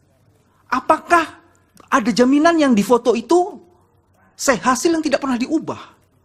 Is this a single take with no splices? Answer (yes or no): yes